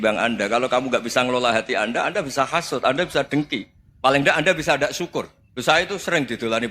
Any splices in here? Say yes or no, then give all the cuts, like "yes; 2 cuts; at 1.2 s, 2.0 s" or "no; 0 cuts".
yes; 1 cut; at 5.4 s